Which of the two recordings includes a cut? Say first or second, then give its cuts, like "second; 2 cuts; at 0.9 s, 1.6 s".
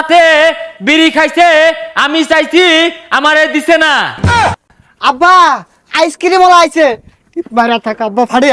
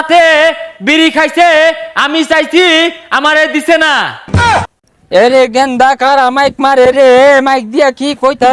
first; 1 cut; at 4.3 s